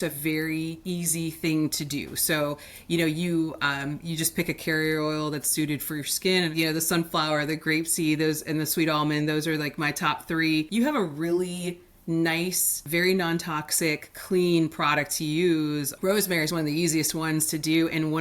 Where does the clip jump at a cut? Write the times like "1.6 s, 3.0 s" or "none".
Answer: 6.5 s, 10.7 s, 12.8 s, 15.9 s